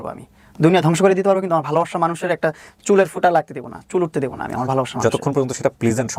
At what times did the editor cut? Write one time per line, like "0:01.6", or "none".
none